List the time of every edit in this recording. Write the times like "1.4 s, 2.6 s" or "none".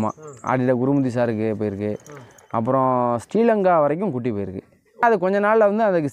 5.0 s